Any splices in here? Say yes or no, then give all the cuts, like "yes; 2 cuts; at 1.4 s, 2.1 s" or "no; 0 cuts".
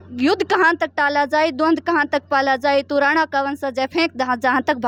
no; 0 cuts